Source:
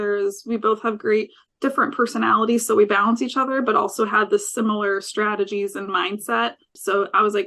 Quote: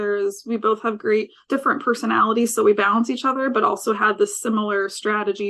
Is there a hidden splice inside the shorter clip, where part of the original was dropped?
yes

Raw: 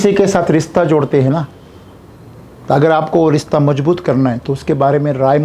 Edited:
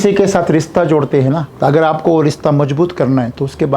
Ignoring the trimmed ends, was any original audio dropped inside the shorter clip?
yes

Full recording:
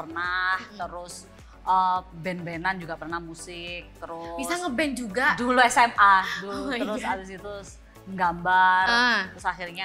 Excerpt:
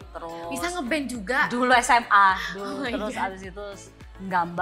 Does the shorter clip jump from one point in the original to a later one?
no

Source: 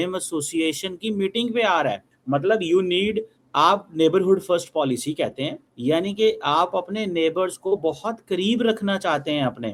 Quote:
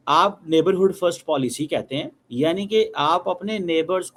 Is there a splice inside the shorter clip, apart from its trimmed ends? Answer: no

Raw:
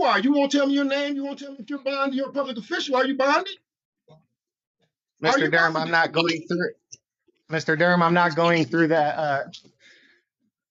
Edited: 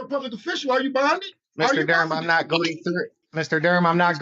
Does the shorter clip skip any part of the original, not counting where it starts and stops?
yes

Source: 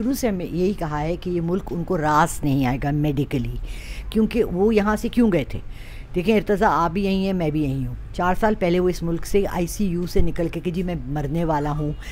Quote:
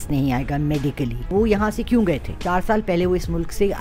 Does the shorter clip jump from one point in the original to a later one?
yes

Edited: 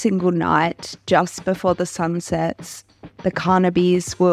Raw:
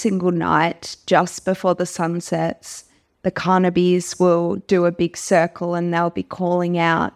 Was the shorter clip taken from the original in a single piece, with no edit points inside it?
yes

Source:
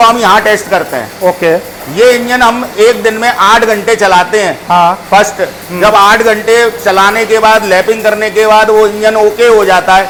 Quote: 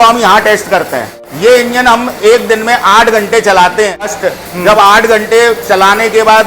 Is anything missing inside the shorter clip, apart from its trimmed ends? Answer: yes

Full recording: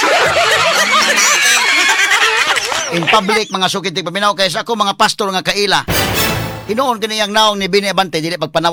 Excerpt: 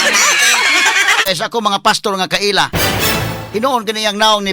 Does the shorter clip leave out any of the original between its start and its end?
yes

